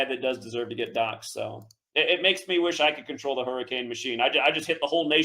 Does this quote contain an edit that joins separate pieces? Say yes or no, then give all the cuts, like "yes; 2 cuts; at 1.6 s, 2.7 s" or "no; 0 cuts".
yes; 1 cut; at 1.8 s